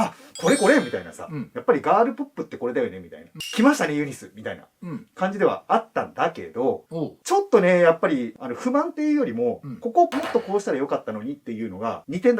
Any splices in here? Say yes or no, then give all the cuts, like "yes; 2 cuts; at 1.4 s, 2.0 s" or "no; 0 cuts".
yes; 1 cut; at 3.4 s